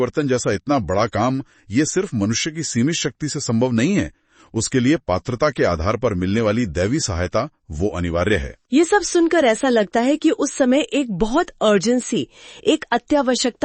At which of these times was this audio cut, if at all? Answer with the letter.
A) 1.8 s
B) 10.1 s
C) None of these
C